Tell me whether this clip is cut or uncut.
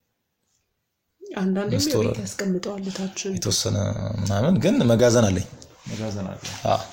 uncut